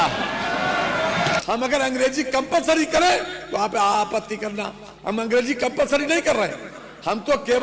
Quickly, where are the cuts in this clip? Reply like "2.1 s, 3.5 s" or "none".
1.4 s